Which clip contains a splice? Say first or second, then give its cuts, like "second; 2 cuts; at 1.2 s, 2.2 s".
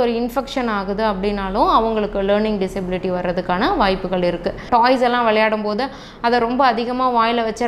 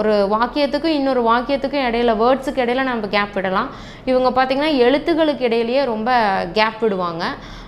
first; 1 cut; at 4.6 s